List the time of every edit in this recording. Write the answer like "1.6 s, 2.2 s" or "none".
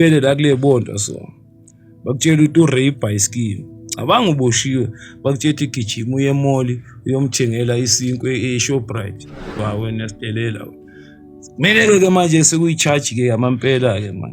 9.5 s